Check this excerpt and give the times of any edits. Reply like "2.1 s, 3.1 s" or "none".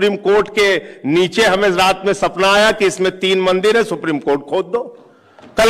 none